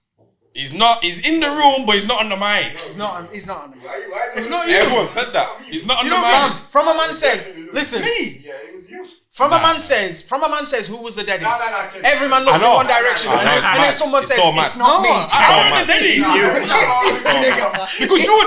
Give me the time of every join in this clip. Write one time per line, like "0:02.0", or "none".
none